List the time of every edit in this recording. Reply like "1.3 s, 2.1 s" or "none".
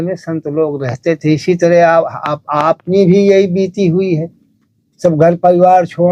none